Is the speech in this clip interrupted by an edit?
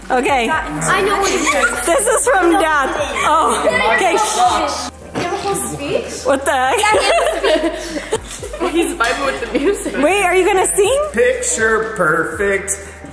yes; 1 cut; at 11.1 s

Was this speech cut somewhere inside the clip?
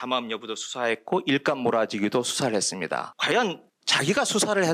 yes; 2 cuts; at 3.1 s, 3.7 s

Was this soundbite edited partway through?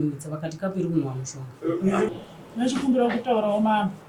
yes; 1 cut; at 2.1 s

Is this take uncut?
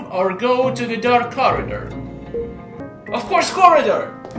no; 1 cut; at 2.8 s

